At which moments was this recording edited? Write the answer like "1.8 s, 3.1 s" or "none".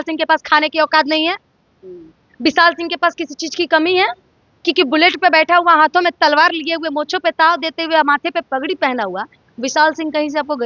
none